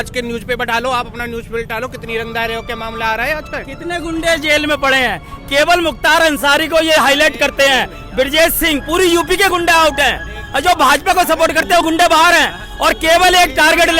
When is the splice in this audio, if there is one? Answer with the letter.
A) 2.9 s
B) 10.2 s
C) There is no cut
C